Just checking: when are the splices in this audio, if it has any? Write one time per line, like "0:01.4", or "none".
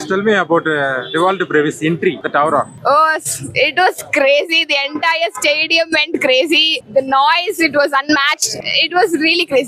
0:02.5
0:06.8
0:08.6